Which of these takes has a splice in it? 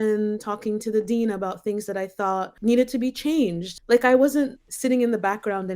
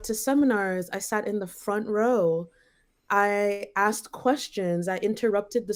first; 3 cuts; at 2.5 s, 3.7 s, 4.6 s

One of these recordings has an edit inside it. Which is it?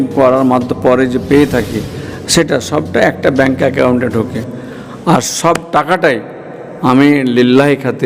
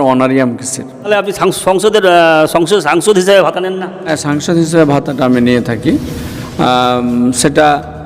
second; 2 cuts; at 1.1 s, 4.1 s

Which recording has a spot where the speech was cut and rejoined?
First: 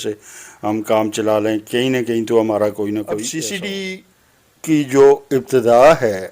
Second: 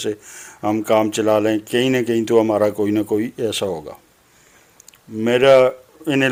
first; 1 cut; at 3.3 s

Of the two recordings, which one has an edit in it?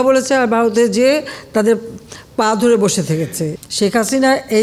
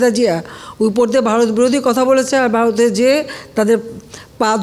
first; 1 cut; at 3.5 s

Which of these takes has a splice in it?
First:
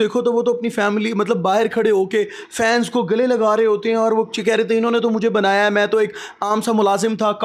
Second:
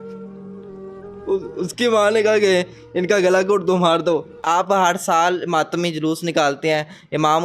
second; 2 cuts; at 1.2 s, 4.3 s

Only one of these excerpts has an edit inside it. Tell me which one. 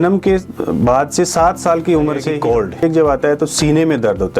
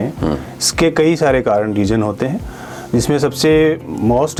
first; 1 cut; at 2.7 s

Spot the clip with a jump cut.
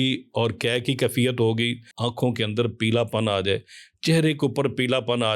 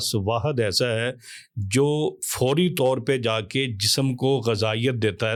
first; 1 cut; at 1.9 s

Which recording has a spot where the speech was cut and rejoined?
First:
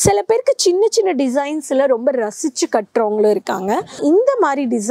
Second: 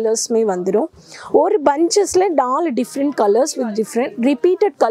first; 1 cut; at 4.0 s

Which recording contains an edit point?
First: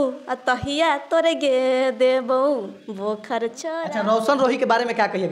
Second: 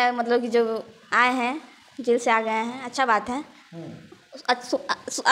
first; 1 cut; at 3.7 s

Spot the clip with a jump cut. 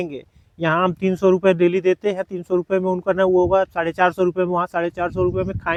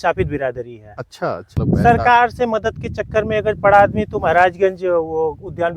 second; 1 cut; at 1.5 s

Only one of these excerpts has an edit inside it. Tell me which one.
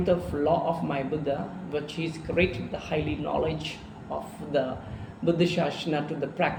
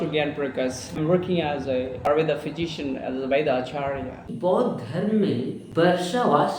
second; 4 cuts; at 1.0 s, 2.1 s, 4.2 s, 5.6 s

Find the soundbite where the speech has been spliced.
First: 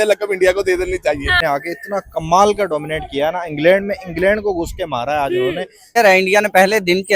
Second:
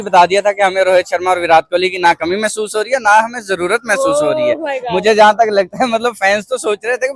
first; 2 cuts; at 1.4 s, 6.0 s

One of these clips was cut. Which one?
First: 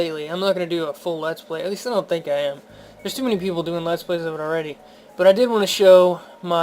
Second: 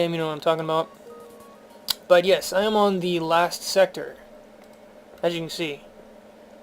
second; 1 cut; at 4.7 s

